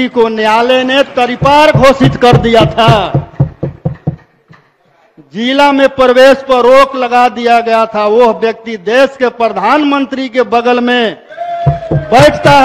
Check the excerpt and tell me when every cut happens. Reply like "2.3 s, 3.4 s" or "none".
none